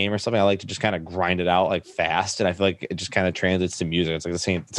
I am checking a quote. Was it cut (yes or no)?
no